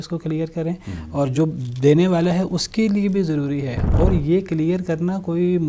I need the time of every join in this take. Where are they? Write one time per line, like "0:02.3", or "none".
0:03.8